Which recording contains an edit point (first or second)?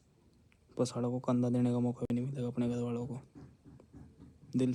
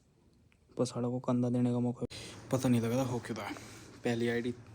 second